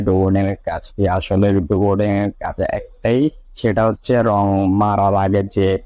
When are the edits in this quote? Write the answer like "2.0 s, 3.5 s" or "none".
none